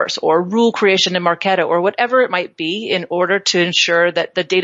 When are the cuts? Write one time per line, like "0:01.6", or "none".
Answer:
none